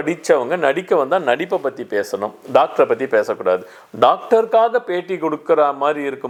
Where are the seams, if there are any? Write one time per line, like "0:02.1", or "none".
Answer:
none